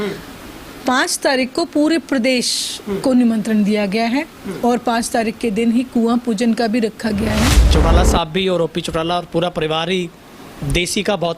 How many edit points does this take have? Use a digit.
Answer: 1